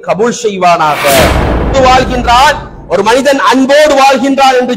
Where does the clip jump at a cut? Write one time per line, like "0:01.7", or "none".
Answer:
0:01.7